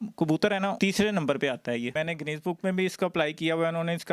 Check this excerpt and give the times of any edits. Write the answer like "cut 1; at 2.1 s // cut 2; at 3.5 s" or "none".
cut 1; at 1.9 s